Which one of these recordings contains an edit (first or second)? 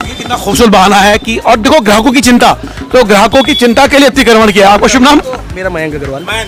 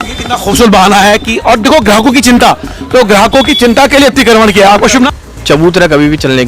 second